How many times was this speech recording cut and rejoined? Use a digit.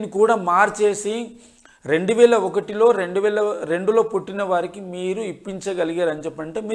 0